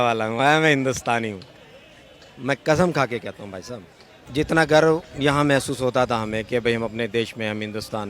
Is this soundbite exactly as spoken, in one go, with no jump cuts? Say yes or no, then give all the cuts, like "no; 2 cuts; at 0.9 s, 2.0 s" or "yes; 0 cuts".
no; 1 cut; at 4.2 s